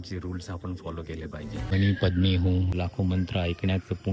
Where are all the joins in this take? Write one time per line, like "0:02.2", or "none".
0:01.7
0:02.7